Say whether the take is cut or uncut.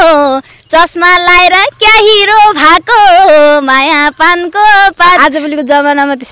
cut